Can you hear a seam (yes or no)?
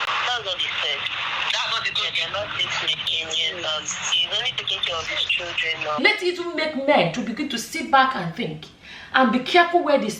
yes